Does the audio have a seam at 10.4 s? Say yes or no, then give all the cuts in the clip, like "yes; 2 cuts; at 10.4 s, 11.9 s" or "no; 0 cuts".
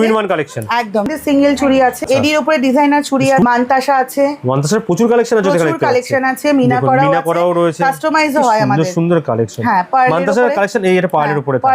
no; 3 cuts; at 1.1 s, 2.0 s, 3.4 s